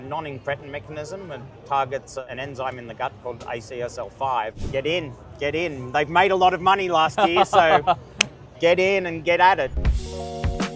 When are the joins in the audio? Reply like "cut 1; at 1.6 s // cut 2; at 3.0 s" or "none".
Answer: cut 1; at 2.2 s // cut 2; at 4.6 s // cut 3; at 9.8 s